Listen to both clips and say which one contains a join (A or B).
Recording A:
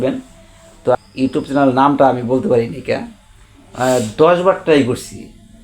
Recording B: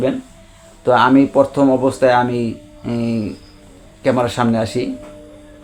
A